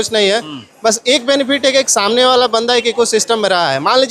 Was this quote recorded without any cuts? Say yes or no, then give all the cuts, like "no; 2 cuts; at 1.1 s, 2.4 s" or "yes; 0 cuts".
yes; 0 cuts